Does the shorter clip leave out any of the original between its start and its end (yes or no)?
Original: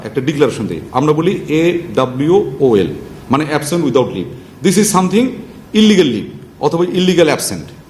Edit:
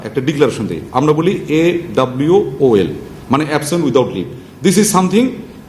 no